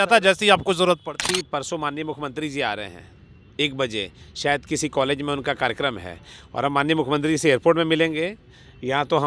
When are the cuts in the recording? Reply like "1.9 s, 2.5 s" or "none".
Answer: 1.2 s